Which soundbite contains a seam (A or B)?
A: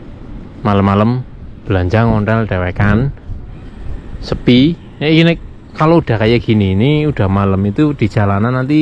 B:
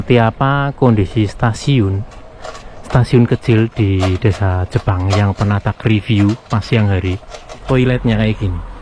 B